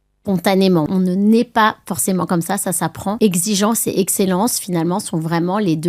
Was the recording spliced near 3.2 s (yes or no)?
yes